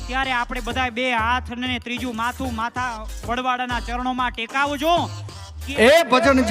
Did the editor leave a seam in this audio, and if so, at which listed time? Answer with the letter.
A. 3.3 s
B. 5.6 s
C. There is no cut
B